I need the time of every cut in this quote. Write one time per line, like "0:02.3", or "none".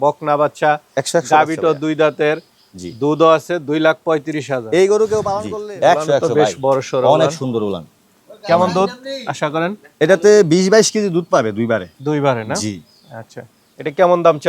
0:05.4